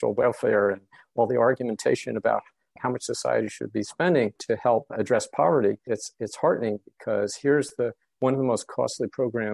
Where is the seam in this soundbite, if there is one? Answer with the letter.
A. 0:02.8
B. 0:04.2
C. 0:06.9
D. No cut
A